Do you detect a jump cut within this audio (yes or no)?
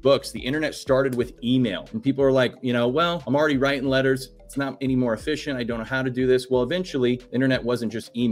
yes